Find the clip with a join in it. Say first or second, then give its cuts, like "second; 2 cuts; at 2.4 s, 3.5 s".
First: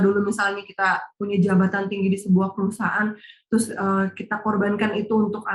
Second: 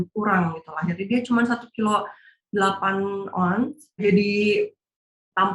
second; 1 cut; at 4.0 s